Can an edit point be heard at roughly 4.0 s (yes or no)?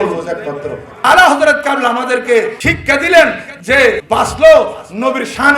yes